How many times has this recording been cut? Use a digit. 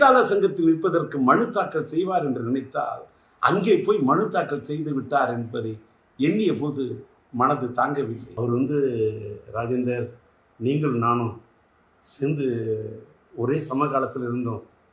1